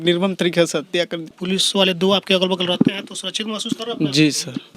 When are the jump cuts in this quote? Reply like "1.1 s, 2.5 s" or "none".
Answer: 1.3 s